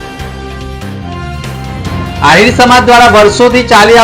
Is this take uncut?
no; 1 cut; at 2.0 s

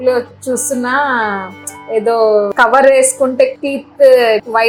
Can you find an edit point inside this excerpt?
no; 0 cuts

